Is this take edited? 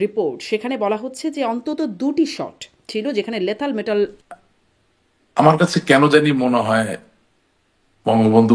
yes; 1 cut; at 4.2 s

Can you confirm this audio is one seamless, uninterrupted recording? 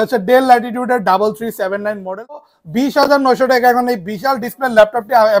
no; 1 cut; at 2.5 s

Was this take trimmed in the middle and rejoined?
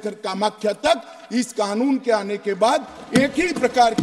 no; 0 cuts

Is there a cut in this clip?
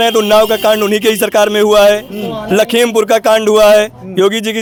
no; 0 cuts

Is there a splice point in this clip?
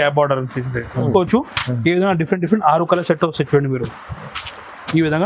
yes; 1 cut; at 1.1 s

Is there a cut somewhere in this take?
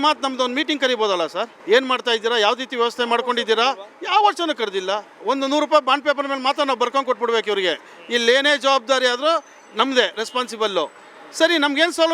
yes; 2 cuts; at 1.5 s, 5.2 s

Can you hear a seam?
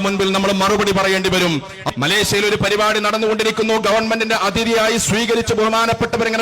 yes; 1 cut; at 1.8 s

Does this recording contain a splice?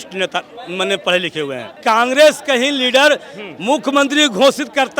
yes; 1 cut; at 1.8 s

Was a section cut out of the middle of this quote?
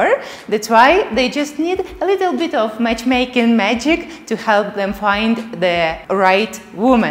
yes; 1 cut; at 6.0 s

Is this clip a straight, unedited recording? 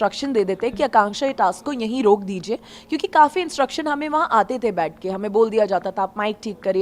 yes; 0 cuts

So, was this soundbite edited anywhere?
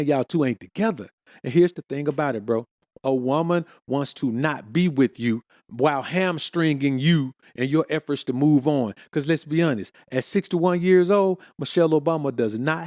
no; 0 cuts

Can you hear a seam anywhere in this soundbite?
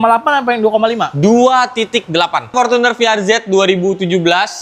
yes; 1 cut; at 2.5 s

